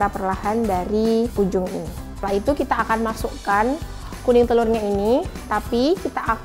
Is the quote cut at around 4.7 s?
no; 1 cut; at 2.1 s

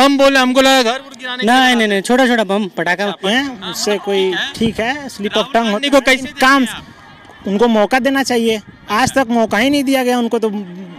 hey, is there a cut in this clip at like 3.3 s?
yes; 1 cut; at 3.3 s

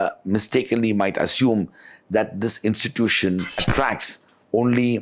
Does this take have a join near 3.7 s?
yes; 1 cut; at 3.7 s

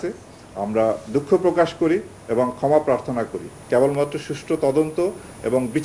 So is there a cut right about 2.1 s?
no; 1 cut; at 3.6 s

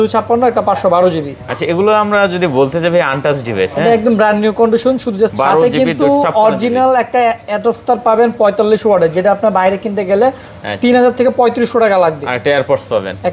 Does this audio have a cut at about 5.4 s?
yes; 1 cut; at 5.4 s

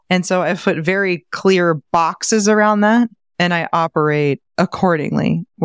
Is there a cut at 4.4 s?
yes; 2 cuts; at 3.2 s, 4.4 s

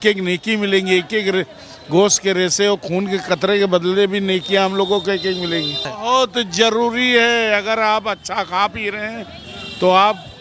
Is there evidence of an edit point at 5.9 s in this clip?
yes; 1 cut; at 5.9 s

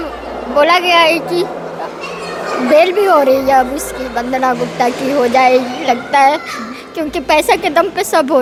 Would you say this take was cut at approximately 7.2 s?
no; 0 cuts

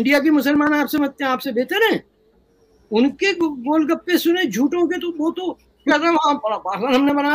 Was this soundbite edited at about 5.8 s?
no; 0 cuts

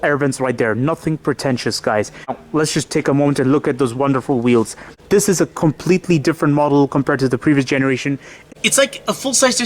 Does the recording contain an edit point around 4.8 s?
yes; 3 cuts; at 2.3 s, 4.8 s, 8.3 s

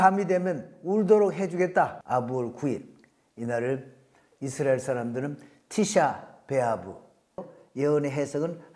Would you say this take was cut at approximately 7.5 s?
yes; 2 cuts; at 2.0 s, 7.5 s

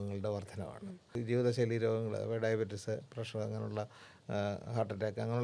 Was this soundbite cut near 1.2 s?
yes; 1 cut; at 1.2 s

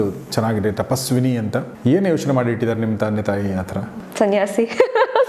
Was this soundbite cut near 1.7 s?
yes; 2 cuts; at 1.7 s, 3.7 s

